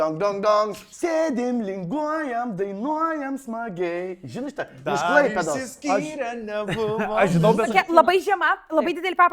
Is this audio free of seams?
no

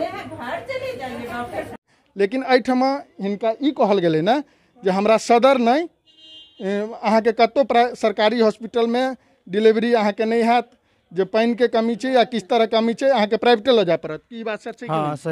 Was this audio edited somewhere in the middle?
yes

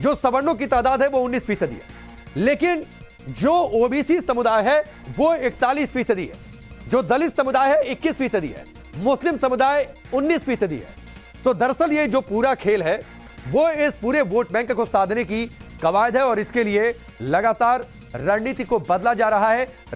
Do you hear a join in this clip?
yes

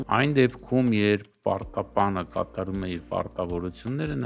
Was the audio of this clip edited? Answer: no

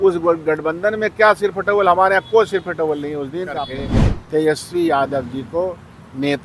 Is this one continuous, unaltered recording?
no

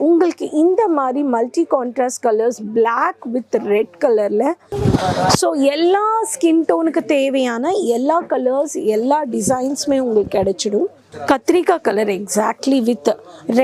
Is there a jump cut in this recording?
yes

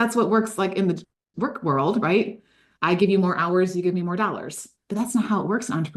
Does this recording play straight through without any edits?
yes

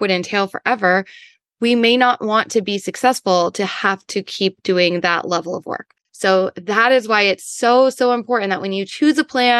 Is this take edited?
no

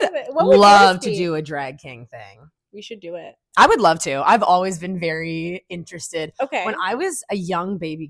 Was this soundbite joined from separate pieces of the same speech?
no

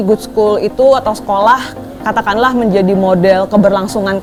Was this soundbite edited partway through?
no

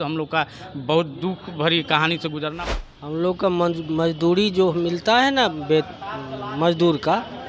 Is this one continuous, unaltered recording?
no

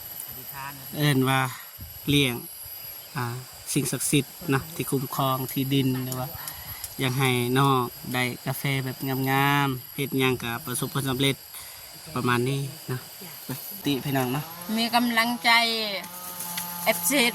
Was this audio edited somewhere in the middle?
yes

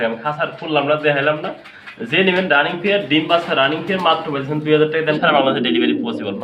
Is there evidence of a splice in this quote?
yes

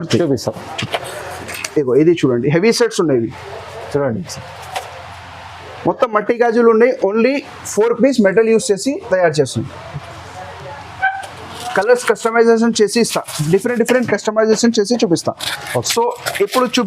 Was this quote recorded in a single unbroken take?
no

